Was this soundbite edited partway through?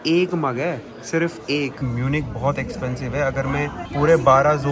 yes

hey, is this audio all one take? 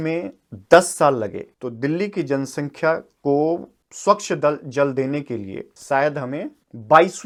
yes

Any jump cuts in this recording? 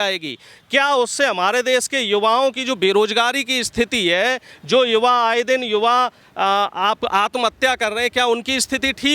no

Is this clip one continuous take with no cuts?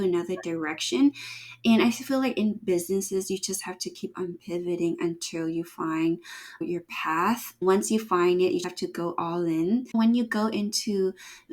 no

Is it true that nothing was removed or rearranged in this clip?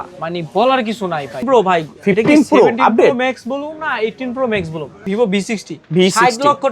no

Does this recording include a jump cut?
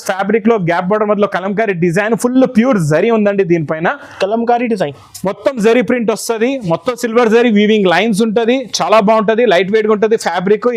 no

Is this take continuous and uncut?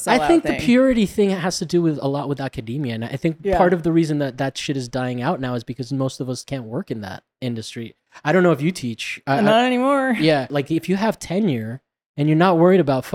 no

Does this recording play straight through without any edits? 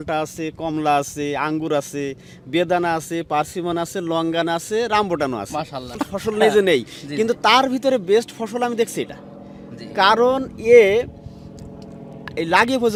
yes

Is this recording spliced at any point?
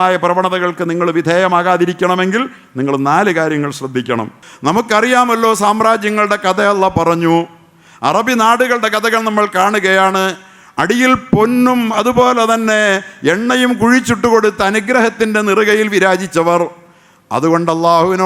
yes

